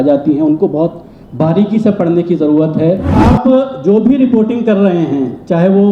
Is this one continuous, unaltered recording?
no; 1 cut; at 3.2 s

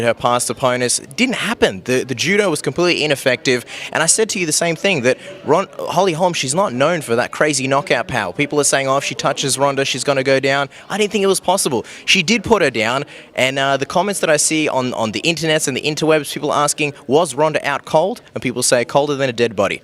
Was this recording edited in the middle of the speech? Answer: no; 0 cuts

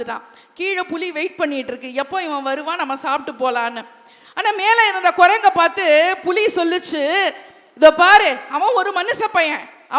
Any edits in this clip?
no; 0 cuts

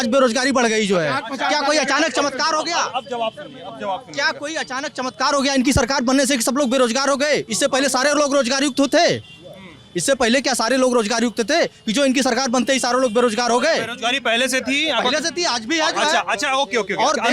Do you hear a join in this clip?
no; 0 cuts

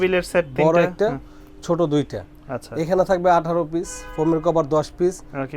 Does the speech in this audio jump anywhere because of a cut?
no; 0 cuts

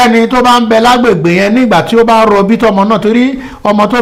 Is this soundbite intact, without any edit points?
yes; 0 cuts

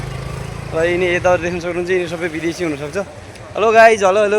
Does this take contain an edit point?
no; 0 cuts

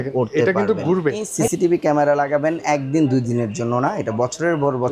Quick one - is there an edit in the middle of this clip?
yes; 1 cut; at 1.5 s

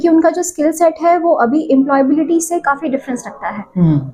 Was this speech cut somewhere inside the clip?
no; 0 cuts

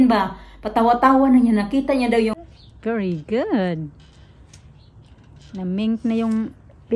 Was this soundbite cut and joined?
yes; 1 cut; at 2.3 s

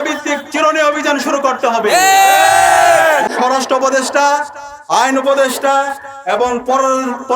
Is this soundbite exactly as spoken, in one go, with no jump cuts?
no; 1 cut; at 3.3 s

